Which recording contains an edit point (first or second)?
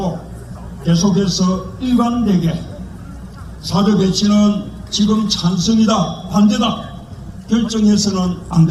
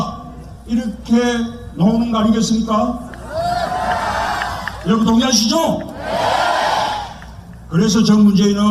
second